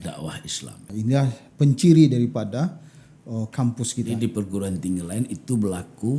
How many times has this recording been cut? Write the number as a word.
two